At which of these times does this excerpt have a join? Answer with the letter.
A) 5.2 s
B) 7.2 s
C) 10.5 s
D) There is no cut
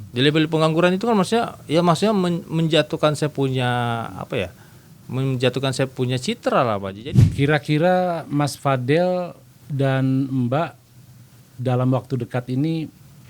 B